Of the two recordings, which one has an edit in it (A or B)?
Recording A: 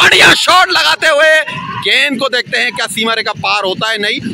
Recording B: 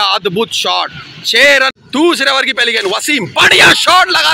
B